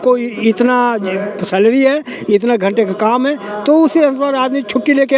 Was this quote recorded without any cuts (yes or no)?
yes